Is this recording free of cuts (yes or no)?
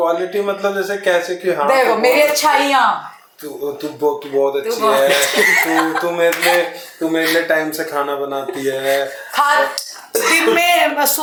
yes